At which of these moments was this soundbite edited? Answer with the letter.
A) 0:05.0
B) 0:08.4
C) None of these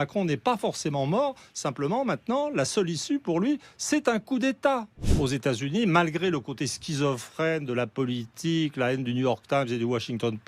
A